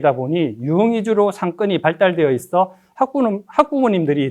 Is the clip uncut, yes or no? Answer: yes